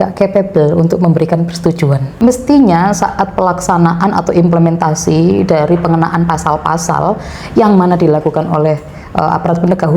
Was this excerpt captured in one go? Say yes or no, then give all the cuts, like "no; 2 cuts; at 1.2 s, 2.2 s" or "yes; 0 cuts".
no; 1 cut; at 2.2 s